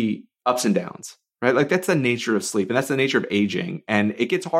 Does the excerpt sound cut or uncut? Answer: uncut